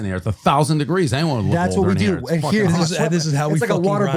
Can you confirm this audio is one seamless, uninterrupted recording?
yes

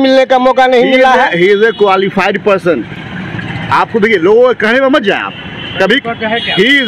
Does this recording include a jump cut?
no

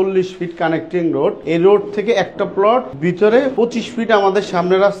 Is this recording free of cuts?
no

